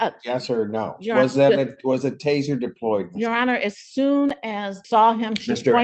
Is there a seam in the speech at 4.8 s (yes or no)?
yes